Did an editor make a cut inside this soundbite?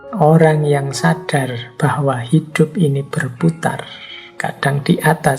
no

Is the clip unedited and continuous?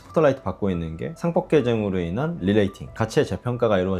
no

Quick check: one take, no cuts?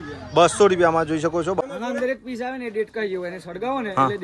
no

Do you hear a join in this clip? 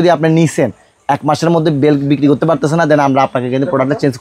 no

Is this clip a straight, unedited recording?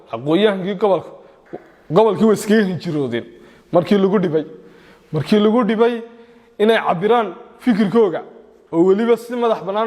yes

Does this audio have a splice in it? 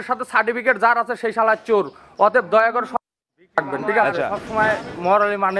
yes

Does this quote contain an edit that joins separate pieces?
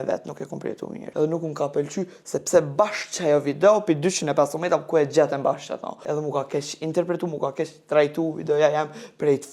yes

